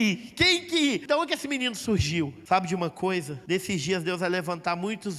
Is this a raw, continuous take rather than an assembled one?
no; 3 cuts; at 1.0 s, 2.4 s, 3.3 s

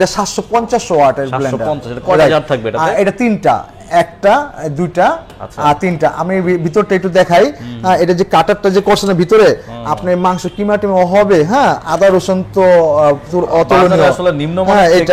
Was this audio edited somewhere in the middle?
no; 0 cuts

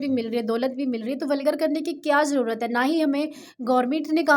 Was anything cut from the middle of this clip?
no; 0 cuts

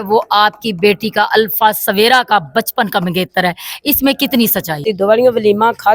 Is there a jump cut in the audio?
yes; 1 cut; at 4.7 s

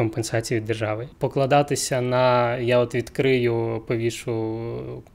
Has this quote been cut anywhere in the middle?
yes; 1 cut; at 1.1 s

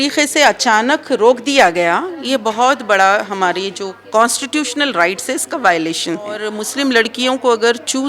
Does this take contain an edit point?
yes; 1 cut; at 6.6 s

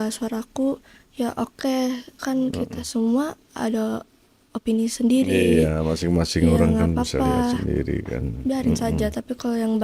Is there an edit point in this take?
no; 0 cuts

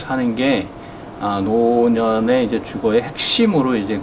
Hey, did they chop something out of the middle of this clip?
no; 0 cuts

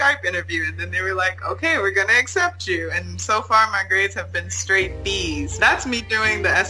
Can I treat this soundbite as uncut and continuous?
no; 1 cut; at 5.6 s

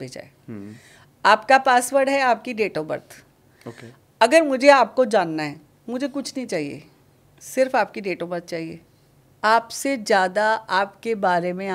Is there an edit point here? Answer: no; 0 cuts

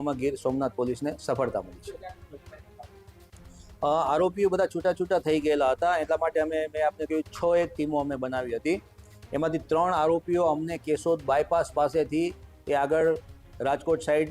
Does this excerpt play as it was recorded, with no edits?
yes; 0 cuts

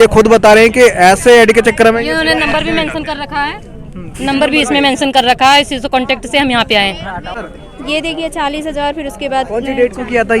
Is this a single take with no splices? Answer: yes; 0 cuts

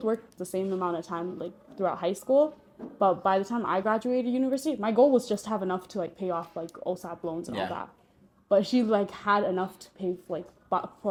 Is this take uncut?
yes; 0 cuts

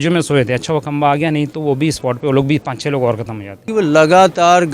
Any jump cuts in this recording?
yes; 1 cut; at 3.6 s

